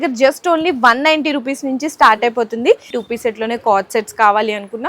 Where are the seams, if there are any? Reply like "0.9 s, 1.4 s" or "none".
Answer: 2.9 s